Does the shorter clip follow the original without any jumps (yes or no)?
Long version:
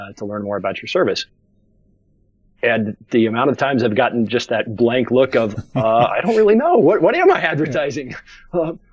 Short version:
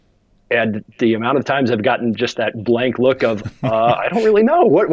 yes